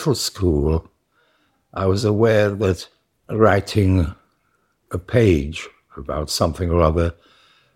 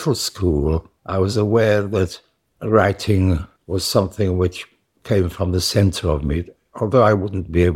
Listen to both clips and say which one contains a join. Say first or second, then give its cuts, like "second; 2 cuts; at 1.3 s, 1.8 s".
second; 2 cuts; at 1.0 s, 3.5 s